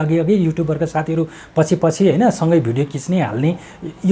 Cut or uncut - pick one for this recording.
uncut